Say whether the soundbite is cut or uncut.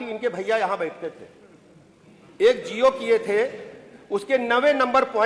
uncut